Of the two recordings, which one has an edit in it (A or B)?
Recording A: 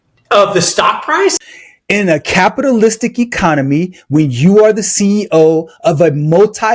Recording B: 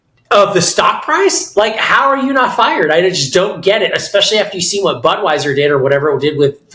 A